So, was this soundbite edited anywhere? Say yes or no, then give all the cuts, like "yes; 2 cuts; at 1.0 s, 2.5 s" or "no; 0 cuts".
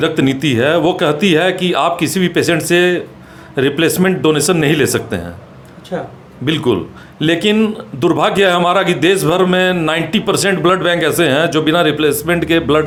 no; 0 cuts